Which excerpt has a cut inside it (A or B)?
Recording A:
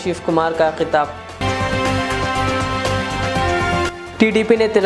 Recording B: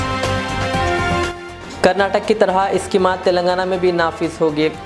B